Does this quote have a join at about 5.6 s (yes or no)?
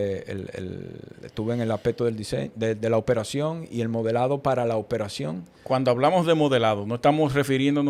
no